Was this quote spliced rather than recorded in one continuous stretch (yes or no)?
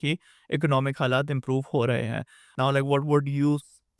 yes